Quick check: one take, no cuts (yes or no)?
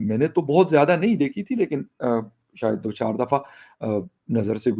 yes